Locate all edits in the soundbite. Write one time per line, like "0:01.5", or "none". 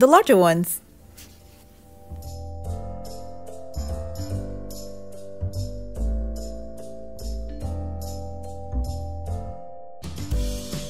0:09.9